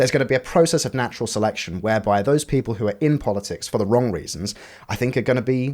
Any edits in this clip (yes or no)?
yes